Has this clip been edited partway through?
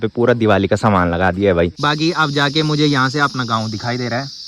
yes; 1 cut; at 1.8 s

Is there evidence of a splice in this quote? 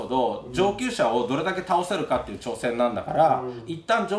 no; 0 cuts

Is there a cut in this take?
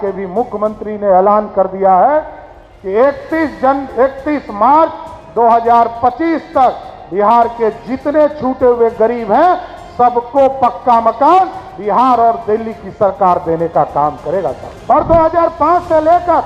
yes; 1 cut; at 14.7 s

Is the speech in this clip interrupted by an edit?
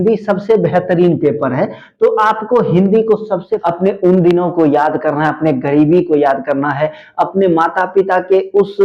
yes; 1 cut; at 3.5 s

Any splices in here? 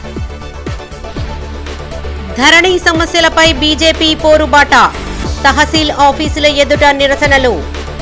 yes; 1 cut; at 1.0 s

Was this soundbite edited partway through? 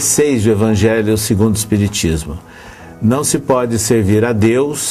yes; 1 cut; at 1.0 s

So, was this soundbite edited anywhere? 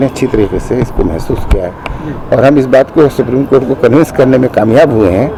no; 0 cuts

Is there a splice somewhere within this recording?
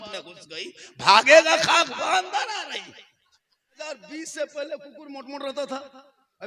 yes; 1 cut; at 3.8 s

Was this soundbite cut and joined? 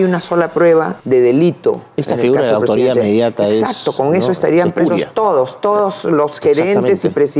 yes; 1 cut; at 1.0 s

